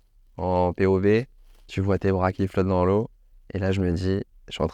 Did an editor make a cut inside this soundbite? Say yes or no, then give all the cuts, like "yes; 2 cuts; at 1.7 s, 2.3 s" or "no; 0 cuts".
no; 0 cuts